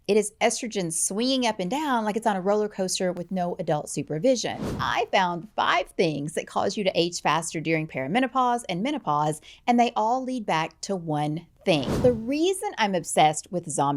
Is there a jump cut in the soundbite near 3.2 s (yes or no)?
no